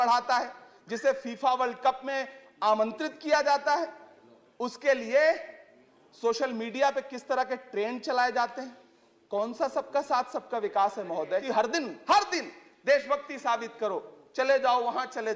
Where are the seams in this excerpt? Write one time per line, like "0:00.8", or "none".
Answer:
0:11.5